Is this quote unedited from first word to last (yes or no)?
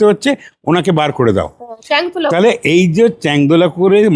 yes